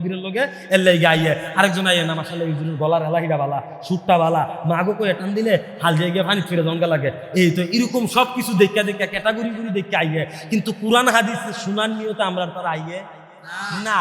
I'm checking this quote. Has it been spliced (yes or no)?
no